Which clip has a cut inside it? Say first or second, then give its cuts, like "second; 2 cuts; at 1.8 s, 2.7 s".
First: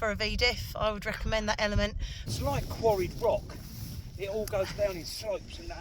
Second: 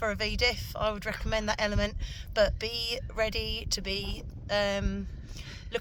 first; 1 cut; at 2.1 s